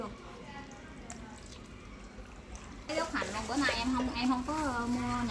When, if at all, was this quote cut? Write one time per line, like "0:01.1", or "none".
0:02.9